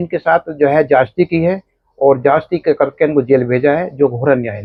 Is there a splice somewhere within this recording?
no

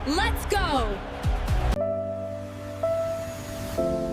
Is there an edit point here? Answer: yes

